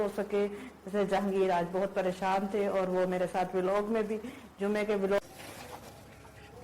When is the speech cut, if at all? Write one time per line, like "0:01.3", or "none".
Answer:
0:05.2